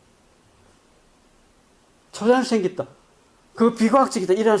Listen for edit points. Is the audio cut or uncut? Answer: cut